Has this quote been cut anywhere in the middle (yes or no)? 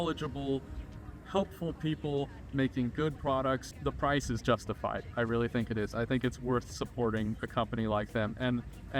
no